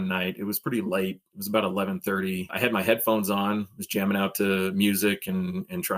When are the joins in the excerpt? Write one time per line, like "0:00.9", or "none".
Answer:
0:02.5